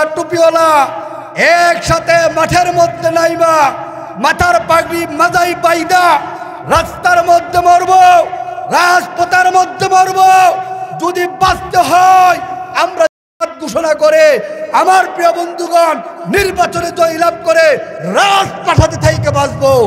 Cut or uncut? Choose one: uncut